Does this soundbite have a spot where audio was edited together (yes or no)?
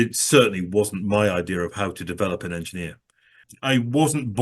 yes